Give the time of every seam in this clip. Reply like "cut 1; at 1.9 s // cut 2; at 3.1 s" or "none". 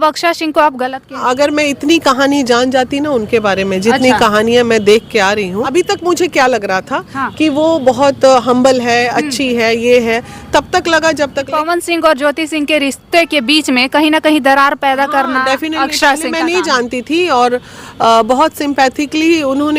cut 1; at 1.2 s // cut 2; at 5.7 s // cut 3; at 11.4 s